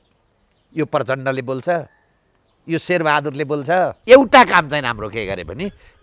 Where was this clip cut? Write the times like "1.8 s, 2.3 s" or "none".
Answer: 4.0 s